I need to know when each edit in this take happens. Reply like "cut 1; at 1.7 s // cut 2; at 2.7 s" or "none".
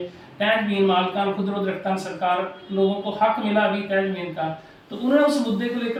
none